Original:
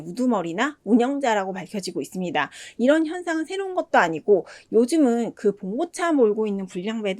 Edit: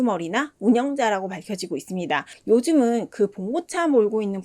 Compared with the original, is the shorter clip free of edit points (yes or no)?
no